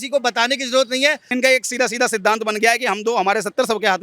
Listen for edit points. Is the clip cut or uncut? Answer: cut